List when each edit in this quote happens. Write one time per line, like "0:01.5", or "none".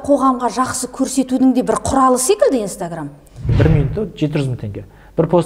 0:03.5